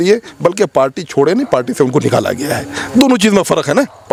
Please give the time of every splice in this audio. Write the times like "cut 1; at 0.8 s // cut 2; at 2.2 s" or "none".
none